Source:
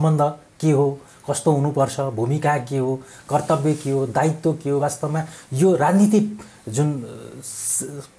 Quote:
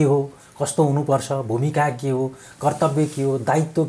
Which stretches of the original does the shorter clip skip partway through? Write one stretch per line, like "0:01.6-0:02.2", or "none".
none